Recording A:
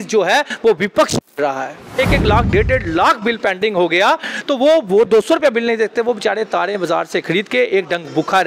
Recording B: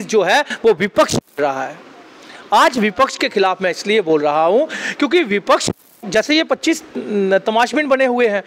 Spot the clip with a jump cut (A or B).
A